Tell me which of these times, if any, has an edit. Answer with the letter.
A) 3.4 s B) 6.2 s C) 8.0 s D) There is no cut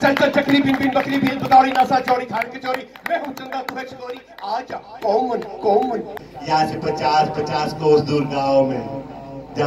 B